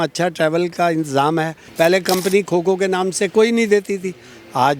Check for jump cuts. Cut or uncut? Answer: cut